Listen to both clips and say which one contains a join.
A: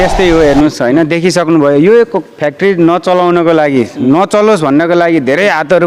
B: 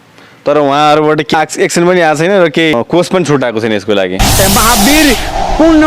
B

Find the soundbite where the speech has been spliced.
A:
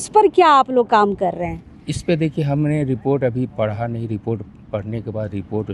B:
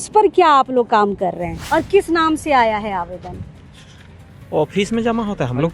B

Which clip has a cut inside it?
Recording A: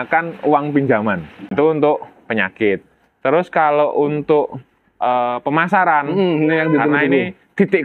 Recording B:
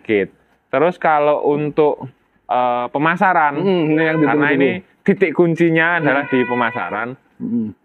A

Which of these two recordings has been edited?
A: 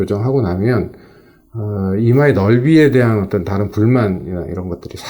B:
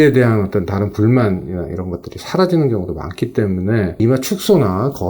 B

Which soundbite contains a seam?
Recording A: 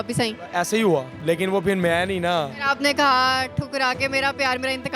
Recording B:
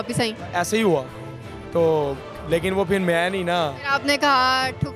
A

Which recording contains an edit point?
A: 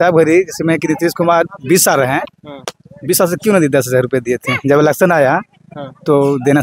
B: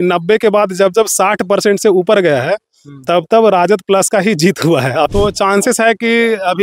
B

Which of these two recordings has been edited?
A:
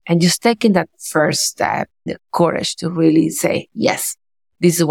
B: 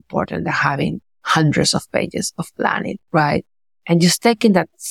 A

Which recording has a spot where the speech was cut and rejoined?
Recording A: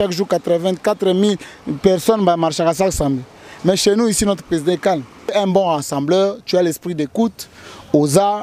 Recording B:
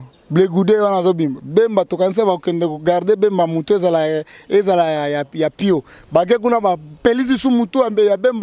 A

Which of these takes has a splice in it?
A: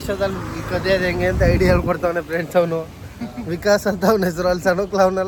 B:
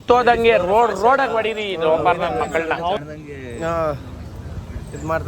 B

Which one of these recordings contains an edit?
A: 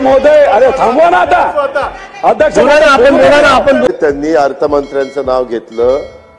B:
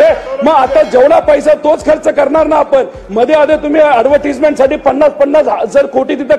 A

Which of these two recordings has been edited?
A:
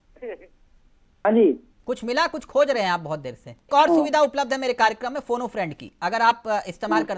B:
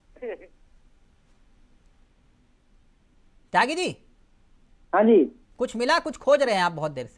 A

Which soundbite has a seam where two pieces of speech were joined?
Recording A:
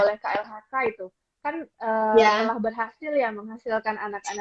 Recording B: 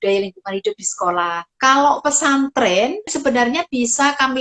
B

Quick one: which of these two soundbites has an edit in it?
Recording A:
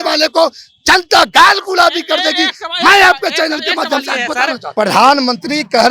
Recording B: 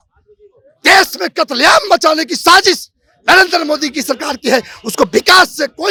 A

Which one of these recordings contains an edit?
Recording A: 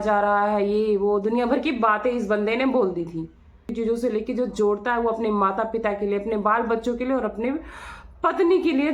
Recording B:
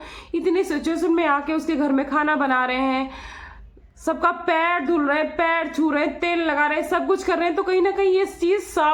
A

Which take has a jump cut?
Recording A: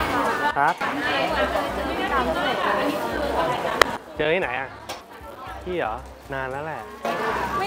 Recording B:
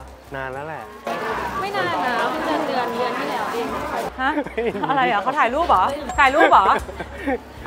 B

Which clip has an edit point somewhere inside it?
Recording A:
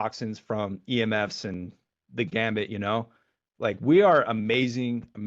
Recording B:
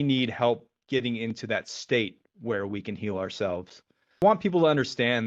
B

